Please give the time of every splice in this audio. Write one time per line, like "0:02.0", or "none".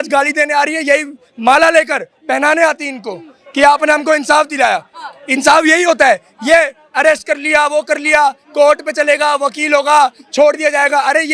none